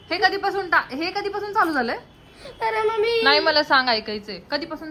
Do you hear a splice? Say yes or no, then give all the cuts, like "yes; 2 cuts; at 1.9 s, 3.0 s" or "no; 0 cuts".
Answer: no; 0 cuts